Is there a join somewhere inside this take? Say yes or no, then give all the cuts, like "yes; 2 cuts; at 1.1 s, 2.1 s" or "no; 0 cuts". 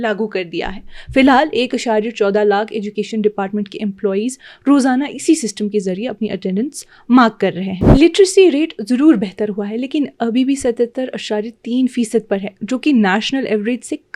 yes; 1 cut; at 7.7 s